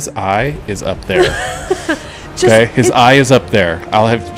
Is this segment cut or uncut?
uncut